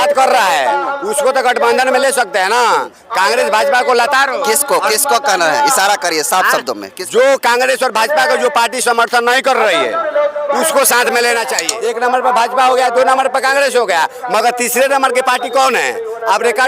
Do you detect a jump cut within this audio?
yes; 1 cut; at 11.7 s

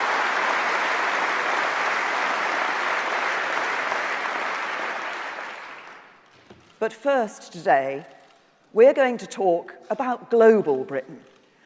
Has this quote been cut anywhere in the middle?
yes; 1 cut; at 4.3 s

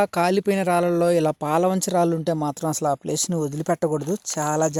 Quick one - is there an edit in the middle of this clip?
no; 0 cuts

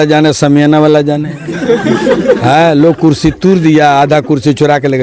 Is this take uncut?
yes; 0 cuts

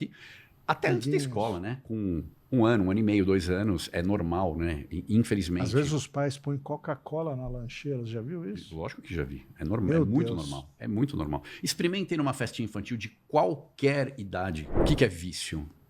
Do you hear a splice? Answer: yes; 1 cut; at 14.7 s

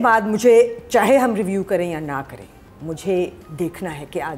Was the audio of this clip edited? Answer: no; 0 cuts

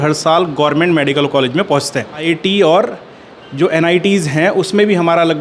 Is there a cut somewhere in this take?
yes; 1 cut; at 2.2 s

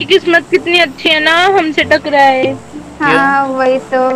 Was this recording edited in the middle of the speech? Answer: no; 0 cuts

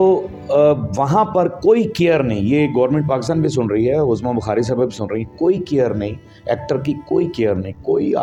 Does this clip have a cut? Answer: no; 0 cuts

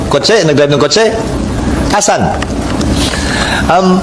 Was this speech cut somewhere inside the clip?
no; 0 cuts

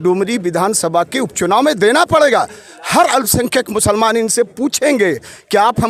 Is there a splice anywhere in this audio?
no; 0 cuts

